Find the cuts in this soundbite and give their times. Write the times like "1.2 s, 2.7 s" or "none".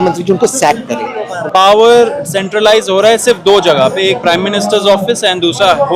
1.3 s

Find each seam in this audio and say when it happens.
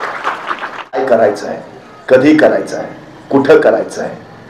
1.0 s

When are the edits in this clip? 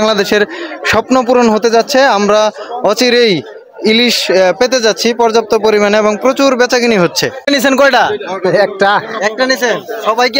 7.5 s

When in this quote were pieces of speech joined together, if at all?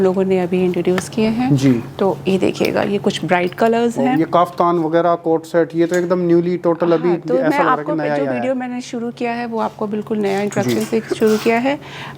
none

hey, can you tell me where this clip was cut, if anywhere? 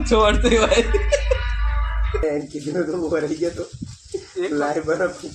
2.2 s

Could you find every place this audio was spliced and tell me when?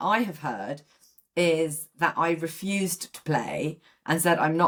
none

